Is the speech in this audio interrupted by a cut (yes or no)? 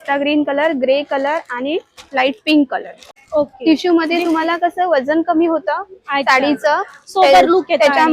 yes